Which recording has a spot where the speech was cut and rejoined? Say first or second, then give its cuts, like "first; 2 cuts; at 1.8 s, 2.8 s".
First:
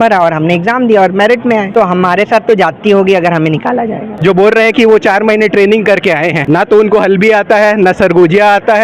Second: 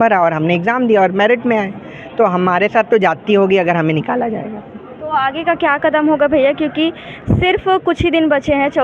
first; 3 cuts; at 1.7 s, 4.1 s, 6.4 s